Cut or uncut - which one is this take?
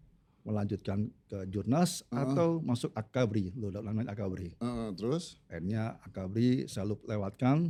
uncut